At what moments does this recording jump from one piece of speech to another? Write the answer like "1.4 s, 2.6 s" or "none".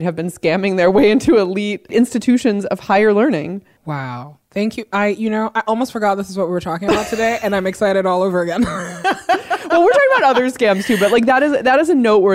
none